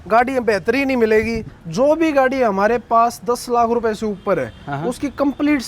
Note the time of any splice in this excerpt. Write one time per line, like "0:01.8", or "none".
0:01.4